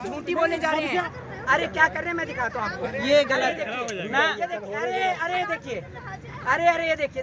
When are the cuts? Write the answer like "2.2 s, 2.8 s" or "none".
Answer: 1.1 s